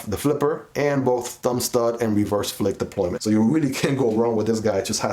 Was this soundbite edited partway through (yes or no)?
no